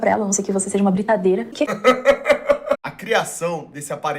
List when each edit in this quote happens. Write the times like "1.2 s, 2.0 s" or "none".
1.5 s, 2.8 s